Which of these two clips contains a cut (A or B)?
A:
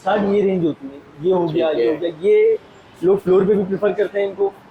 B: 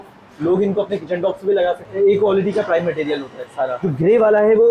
B